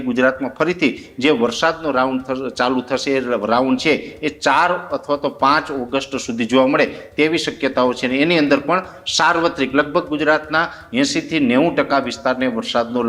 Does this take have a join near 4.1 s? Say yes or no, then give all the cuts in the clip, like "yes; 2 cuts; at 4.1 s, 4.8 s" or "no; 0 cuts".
no; 0 cuts